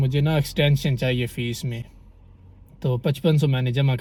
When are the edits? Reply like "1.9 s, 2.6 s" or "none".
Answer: none